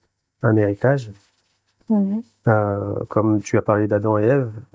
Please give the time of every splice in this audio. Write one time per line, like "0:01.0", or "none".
none